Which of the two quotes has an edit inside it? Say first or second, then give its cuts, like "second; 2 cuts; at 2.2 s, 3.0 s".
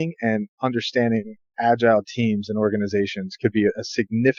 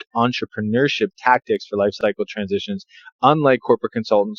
second; 1 cut; at 2.0 s